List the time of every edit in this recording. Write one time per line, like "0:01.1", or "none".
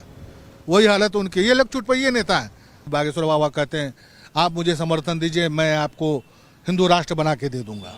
0:02.9